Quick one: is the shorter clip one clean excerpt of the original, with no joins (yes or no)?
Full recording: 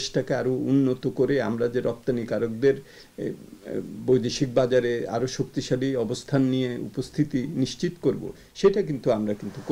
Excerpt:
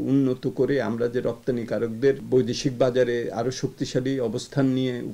no